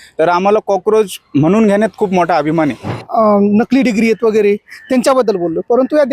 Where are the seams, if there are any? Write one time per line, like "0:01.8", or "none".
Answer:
0:03.0